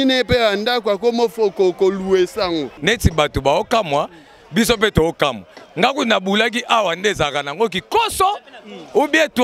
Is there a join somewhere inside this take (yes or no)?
yes